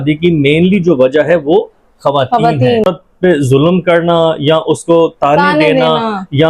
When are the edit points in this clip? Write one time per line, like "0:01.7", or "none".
0:02.8